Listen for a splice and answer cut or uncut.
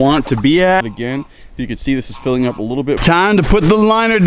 cut